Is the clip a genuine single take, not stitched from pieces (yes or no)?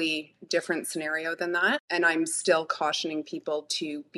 no